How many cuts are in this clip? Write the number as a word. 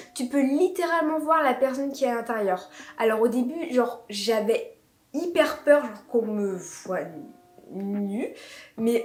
zero